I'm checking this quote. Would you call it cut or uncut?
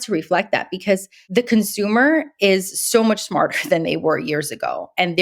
cut